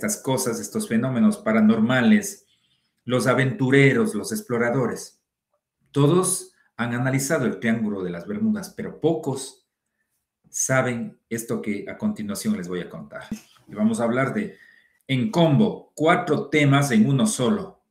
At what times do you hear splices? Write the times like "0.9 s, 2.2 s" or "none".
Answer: 13.5 s

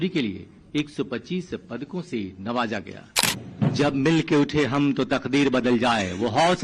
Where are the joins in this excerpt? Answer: 3.3 s

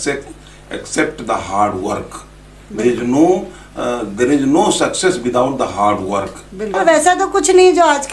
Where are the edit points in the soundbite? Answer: 6.8 s

